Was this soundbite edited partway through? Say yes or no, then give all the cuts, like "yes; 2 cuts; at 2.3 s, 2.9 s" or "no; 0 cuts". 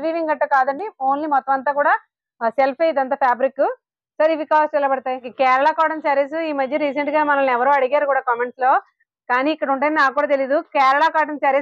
yes; 1 cut; at 5.3 s